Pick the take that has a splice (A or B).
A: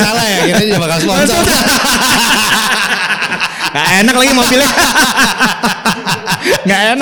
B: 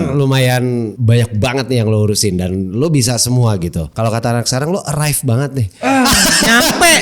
B